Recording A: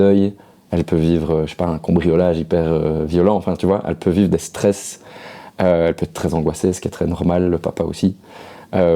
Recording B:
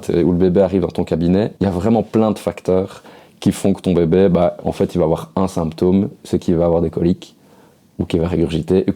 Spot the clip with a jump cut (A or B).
B